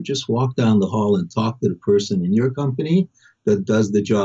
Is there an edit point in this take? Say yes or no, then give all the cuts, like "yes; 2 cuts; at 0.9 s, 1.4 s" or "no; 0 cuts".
no; 0 cuts